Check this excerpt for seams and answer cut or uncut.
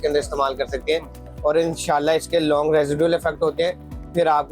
uncut